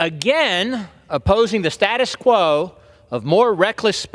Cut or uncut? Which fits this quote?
cut